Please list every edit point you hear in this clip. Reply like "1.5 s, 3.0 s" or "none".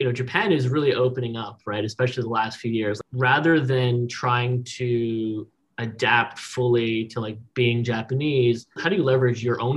3.0 s, 8.8 s

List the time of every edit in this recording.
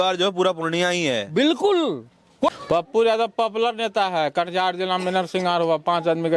2.5 s

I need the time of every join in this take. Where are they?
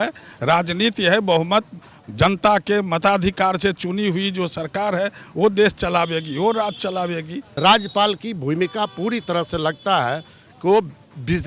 7.4 s

